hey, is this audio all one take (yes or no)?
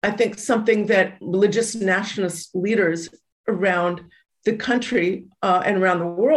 yes